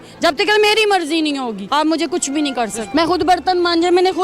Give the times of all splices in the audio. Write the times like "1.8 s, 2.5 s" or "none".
1.6 s, 2.8 s